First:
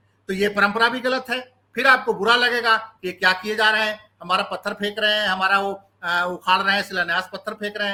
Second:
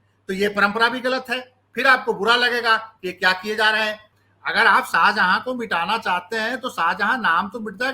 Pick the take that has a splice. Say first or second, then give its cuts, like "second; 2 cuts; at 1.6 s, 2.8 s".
second; 1 cut; at 4.1 s